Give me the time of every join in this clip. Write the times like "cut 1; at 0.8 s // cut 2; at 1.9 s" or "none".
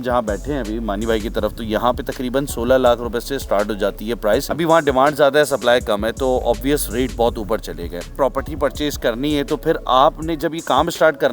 cut 1; at 4.5 s // cut 2; at 8.1 s

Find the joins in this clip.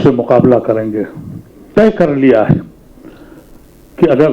cut 1; at 1.7 s

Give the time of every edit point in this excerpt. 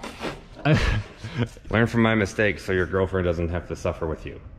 cut 1; at 1.6 s

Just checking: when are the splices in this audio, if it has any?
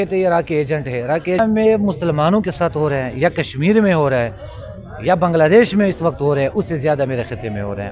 cut 1; at 1.4 s

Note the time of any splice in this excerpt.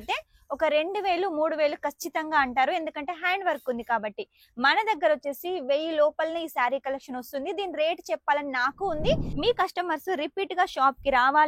cut 1; at 9.3 s

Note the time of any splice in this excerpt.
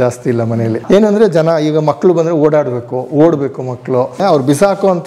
cut 1; at 0.8 s // cut 2; at 4.2 s

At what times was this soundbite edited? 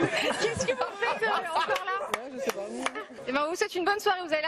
cut 1; at 3.1 s

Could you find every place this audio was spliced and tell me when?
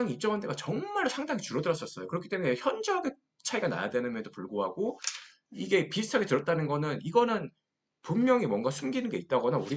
none

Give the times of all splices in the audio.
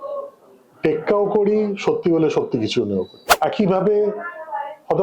cut 1; at 3.2 s

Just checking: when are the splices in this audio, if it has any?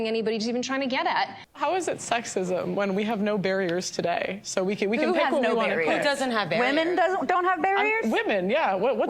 cut 1; at 1.4 s

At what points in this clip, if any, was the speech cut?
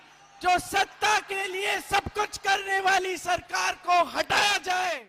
none

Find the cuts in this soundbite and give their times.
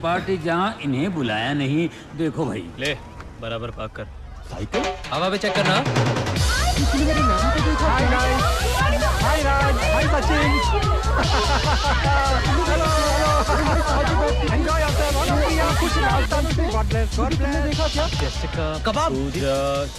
none

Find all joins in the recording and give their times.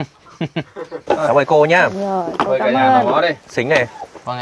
cut 1; at 0.9 s

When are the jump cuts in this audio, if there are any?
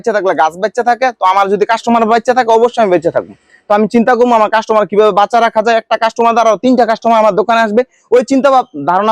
none

